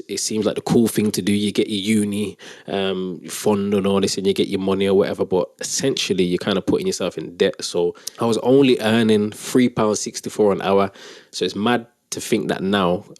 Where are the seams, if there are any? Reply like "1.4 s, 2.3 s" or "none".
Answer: 8.0 s